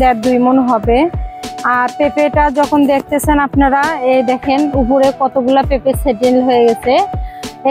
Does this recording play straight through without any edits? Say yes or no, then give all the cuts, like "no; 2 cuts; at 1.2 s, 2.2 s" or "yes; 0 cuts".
yes; 0 cuts